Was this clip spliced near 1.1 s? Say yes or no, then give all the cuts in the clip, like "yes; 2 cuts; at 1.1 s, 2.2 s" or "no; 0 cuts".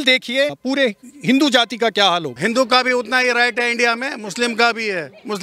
no; 1 cut; at 2.3 s